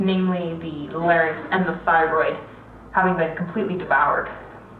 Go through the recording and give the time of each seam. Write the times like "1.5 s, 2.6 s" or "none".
2.9 s